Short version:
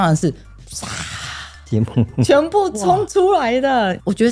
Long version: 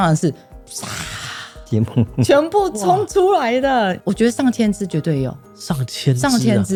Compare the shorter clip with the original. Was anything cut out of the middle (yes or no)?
no